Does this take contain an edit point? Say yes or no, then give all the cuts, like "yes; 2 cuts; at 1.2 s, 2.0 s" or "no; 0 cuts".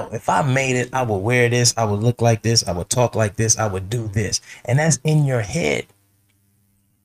no; 0 cuts